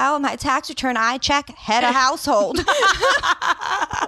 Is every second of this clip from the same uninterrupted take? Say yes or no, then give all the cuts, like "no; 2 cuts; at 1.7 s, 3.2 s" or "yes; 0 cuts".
yes; 0 cuts